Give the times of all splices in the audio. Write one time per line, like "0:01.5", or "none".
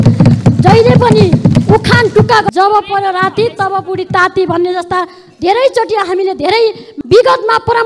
0:02.5
0:06.9